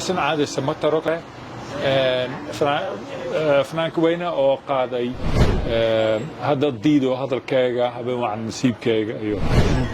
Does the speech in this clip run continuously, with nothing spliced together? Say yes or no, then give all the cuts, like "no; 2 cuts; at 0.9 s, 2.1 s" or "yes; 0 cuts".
no; 1 cut; at 1.1 s